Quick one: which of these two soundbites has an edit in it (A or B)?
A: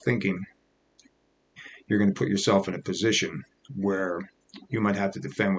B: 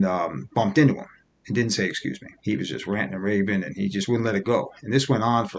B